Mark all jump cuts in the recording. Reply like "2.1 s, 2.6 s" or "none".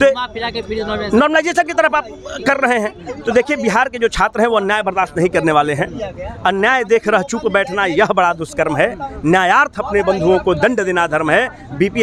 none